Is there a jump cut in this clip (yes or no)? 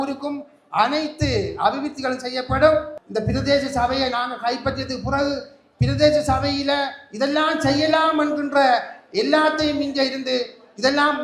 yes